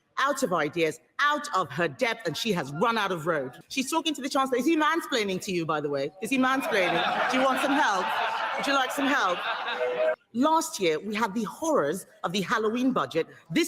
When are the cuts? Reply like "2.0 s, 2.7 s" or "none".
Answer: 3.6 s, 10.2 s